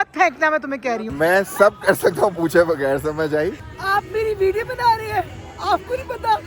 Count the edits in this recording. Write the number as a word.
two